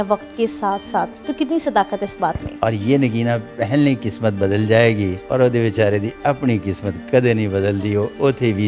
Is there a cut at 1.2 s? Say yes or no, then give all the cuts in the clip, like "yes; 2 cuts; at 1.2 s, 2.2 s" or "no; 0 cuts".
no; 2 cuts; at 2.5 s, 5.2 s